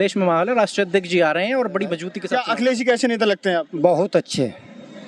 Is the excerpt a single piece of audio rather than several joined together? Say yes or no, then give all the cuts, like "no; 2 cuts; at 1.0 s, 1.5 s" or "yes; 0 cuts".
no; 1 cut; at 2.1 s